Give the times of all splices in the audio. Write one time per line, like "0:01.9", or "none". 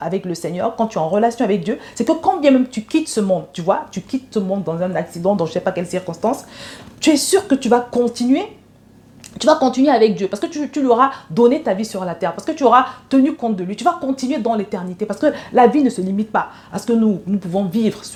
none